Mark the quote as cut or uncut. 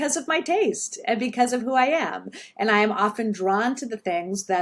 uncut